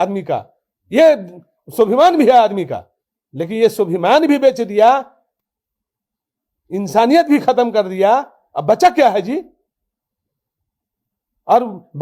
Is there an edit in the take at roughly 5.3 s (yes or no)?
no